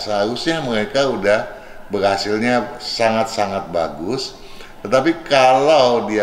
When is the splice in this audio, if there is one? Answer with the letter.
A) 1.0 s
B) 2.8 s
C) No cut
C